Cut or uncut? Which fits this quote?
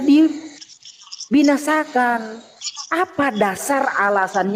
uncut